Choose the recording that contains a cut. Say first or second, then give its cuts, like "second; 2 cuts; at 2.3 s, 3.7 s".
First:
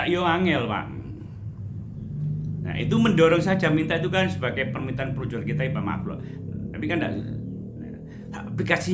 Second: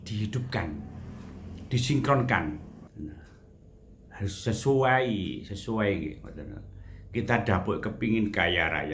second; 1 cut; at 2.9 s